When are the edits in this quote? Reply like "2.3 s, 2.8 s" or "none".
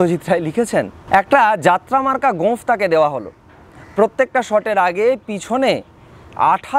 1.0 s